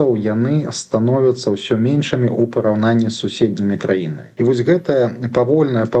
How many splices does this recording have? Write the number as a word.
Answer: one